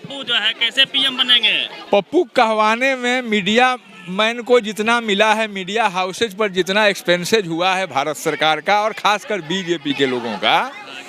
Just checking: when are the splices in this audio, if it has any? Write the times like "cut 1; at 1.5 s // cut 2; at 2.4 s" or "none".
cut 1; at 1.8 s

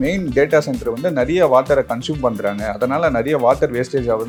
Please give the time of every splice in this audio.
none

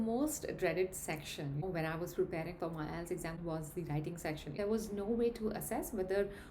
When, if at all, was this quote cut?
cut 1; at 1.6 s // cut 2; at 3.4 s // cut 3; at 4.6 s

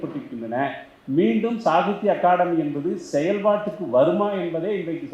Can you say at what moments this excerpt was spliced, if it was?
none

